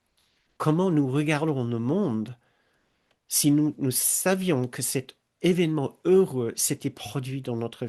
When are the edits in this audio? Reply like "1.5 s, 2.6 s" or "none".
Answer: 3.8 s